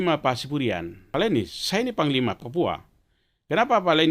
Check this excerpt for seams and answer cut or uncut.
cut